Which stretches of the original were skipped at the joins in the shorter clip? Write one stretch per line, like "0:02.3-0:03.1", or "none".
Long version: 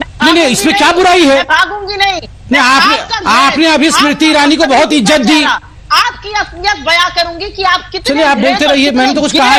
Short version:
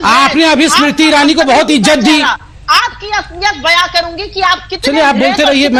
none